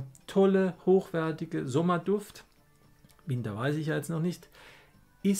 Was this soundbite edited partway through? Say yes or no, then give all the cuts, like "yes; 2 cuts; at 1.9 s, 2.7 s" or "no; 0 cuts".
no; 0 cuts